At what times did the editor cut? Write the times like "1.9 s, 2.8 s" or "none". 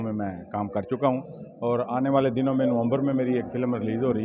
none